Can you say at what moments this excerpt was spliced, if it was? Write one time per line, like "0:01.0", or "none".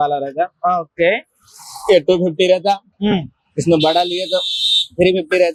none